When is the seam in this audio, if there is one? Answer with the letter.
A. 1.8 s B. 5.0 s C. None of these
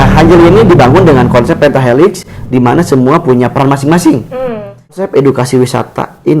B